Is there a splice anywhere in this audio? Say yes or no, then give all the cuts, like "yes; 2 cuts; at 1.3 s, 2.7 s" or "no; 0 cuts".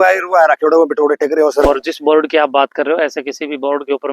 yes; 1 cut; at 1.6 s